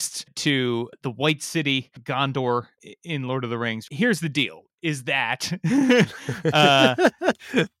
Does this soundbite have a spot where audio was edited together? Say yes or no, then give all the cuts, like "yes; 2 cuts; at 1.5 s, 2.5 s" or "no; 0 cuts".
yes; 1 cut; at 2.7 s